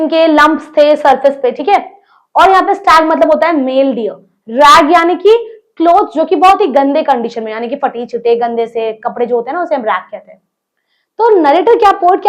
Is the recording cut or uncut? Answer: uncut